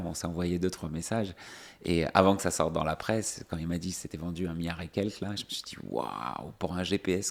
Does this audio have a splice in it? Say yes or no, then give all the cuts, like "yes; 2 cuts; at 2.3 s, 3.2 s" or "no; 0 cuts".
no; 0 cuts